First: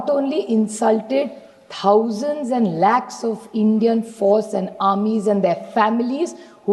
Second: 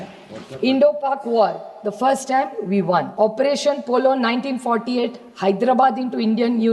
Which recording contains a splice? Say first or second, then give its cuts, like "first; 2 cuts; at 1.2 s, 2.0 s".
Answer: second; 1 cut; at 3.1 s